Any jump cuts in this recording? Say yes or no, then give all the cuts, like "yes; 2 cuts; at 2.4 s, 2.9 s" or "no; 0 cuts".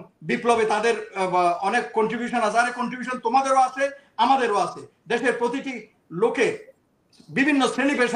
no; 0 cuts